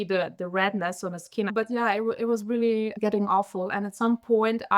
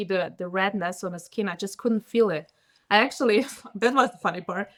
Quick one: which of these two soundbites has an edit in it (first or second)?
first